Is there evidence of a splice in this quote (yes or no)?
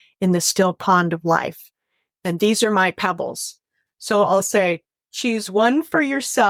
no